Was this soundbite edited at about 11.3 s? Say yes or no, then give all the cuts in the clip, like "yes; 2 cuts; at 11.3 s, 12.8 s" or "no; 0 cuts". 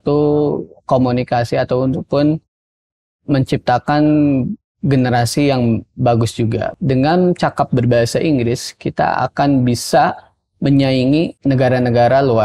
yes; 2 cuts; at 6.7 s, 11.3 s